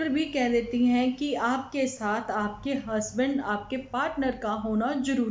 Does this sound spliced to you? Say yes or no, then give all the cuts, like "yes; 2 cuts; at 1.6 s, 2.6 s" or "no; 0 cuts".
no; 0 cuts